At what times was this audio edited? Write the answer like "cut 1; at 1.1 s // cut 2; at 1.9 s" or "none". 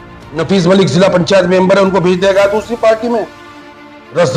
none